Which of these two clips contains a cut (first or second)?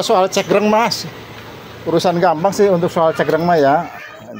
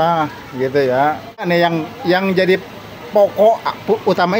second